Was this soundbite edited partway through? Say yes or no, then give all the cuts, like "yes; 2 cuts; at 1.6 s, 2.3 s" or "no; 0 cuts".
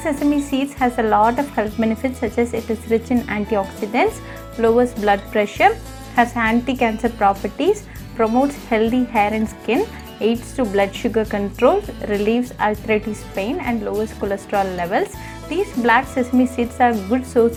no; 0 cuts